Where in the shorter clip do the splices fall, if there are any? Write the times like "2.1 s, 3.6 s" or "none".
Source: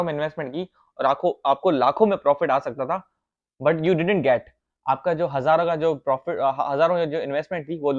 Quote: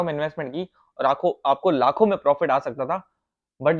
none